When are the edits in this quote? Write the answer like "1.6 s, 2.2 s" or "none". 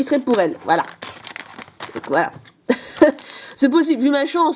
none